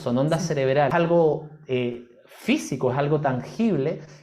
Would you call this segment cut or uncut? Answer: cut